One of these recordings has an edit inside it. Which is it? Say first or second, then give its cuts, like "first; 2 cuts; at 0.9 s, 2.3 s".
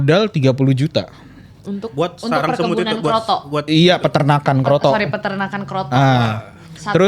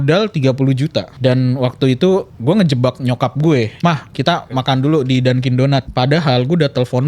second; 4 cuts; at 1.1 s, 2.3 s, 3.7 s, 5.9 s